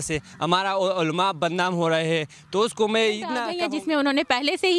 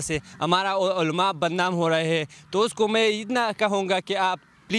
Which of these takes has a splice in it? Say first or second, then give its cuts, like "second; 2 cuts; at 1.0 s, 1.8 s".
first; 1 cut; at 3.5 s